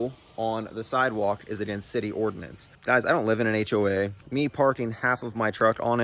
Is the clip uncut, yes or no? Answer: no